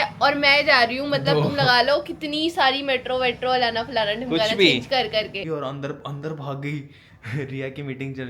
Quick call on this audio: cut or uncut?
cut